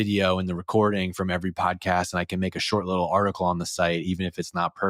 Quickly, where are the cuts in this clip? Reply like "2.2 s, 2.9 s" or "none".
none